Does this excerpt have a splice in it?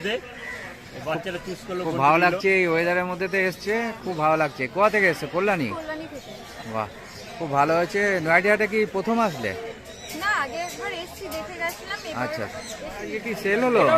yes; 1 cut; at 13.1 s

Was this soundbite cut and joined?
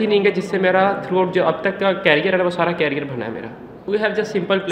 yes; 1 cut; at 3.7 s

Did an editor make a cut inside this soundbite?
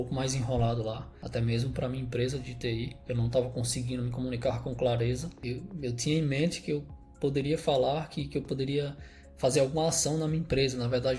yes; 2 cuts; at 1.1 s, 5.3 s

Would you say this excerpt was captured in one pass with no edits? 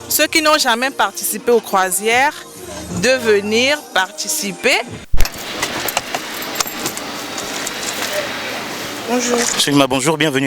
no; 1 cut; at 5.1 s

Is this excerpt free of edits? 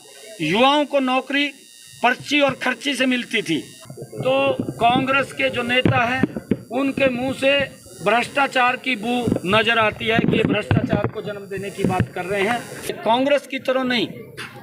no; 2 cuts; at 4.0 s, 12.9 s

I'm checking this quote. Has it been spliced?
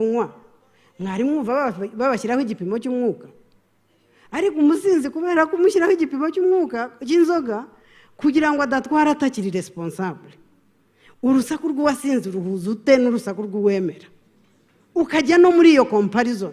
no; 0 cuts

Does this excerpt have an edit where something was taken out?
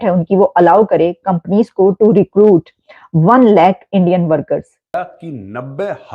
yes; 1 cut; at 4.9 s

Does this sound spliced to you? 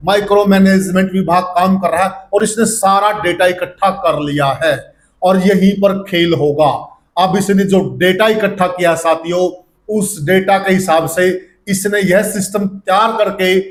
no; 0 cuts

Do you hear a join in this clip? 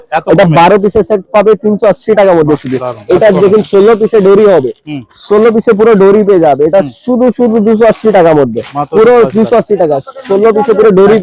no; 0 cuts

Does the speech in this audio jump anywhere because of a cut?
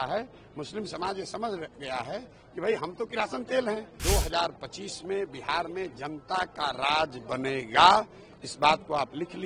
yes; 1 cut; at 3.9 s

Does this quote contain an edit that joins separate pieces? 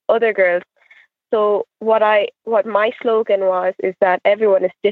no; 0 cuts

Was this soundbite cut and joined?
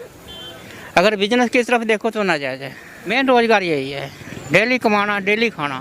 yes; 1 cut; at 3.0 s

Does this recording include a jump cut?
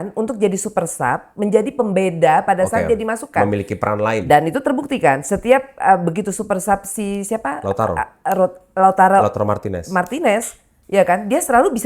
no; 0 cuts

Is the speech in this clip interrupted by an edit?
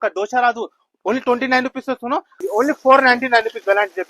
yes; 1 cut; at 2.4 s

